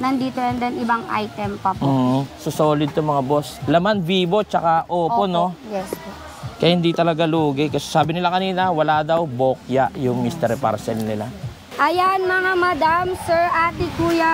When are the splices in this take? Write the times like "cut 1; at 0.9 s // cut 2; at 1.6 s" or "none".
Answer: cut 1; at 2.4 s // cut 2; at 3.5 s // cut 3; at 11.6 s